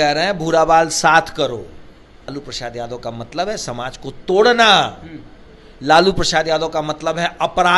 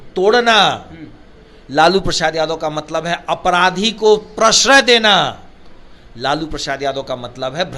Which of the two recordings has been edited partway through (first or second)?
first